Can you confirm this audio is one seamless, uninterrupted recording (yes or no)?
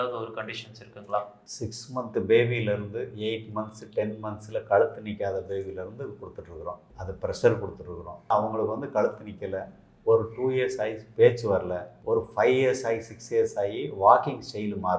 yes